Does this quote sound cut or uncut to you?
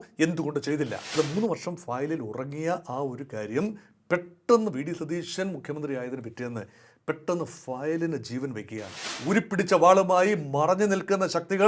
cut